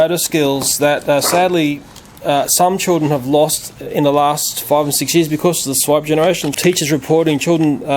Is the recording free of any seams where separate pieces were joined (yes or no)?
no